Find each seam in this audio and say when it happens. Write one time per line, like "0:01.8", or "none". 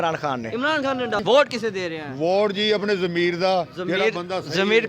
0:01.2